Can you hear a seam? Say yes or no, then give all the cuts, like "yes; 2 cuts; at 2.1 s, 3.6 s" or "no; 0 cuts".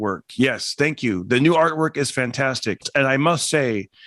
yes; 1 cut; at 2.9 s